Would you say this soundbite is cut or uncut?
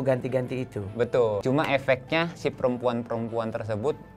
cut